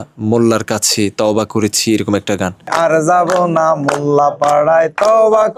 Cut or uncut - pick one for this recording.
uncut